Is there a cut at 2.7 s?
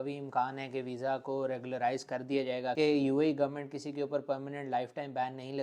yes; 1 cut; at 2.7 s

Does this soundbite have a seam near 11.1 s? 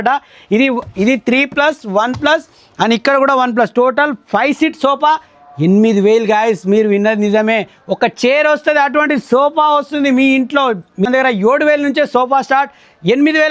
yes; 1 cut; at 11.1 s

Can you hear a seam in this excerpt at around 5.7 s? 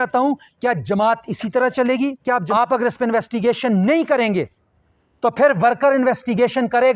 no; 1 cut; at 2.5 s

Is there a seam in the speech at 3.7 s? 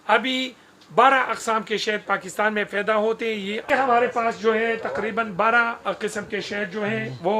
yes; 1 cut; at 3.7 s

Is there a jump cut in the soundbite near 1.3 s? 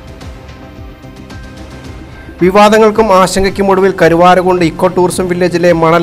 yes; 1 cut; at 1.3 s

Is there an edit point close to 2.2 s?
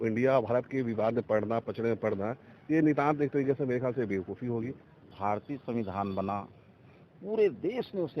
no; 1 cut; at 5.1 s

